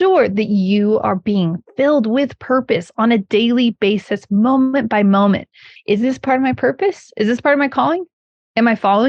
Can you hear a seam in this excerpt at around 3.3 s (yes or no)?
yes